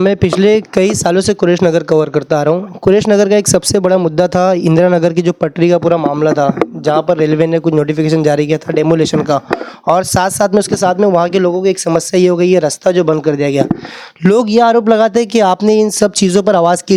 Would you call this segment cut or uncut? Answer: uncut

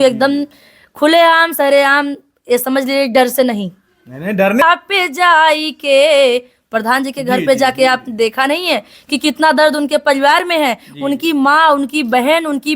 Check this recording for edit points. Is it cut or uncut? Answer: cut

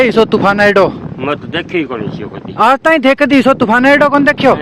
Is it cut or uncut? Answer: uncut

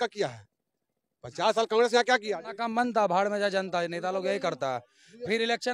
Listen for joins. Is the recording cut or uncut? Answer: cut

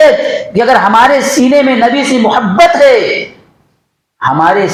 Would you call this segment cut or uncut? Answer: uncut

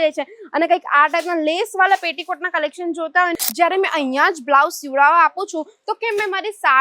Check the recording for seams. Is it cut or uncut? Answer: cut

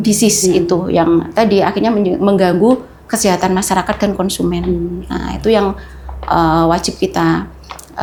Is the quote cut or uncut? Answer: uncut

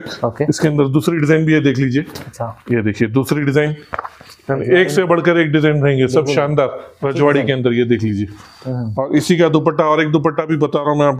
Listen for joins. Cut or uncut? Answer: uncut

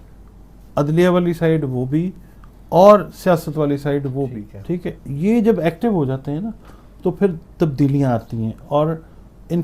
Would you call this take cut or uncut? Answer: cut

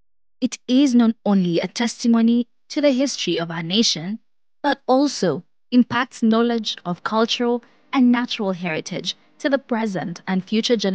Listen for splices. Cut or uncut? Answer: uncut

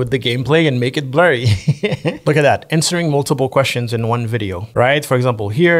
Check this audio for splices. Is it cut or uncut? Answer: cut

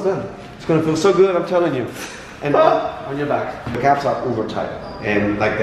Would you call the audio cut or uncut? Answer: uncut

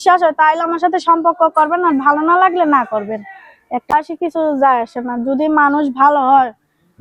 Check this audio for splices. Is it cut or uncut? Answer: cut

